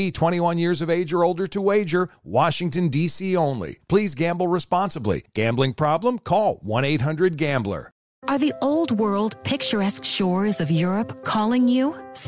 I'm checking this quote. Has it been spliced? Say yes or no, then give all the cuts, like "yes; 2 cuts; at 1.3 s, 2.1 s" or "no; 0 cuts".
yes; 1 cut; at 8.0 s